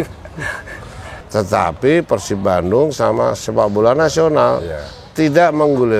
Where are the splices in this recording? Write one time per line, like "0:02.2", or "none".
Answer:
0:01.2